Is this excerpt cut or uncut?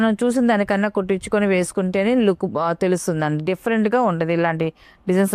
uncut